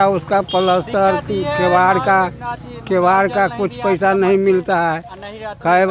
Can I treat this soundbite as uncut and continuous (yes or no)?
yes